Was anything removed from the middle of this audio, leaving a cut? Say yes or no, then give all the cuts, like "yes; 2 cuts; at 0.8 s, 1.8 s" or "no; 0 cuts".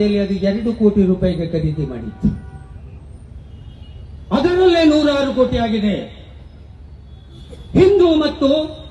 no; 0 cuts